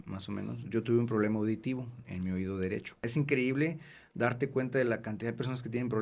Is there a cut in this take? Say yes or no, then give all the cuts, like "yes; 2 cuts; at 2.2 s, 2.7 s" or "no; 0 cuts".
yes; 1 cut; at 3.0 s